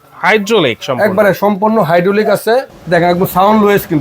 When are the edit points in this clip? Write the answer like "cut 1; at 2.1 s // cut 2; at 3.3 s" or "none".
cut 1; at 2.8 s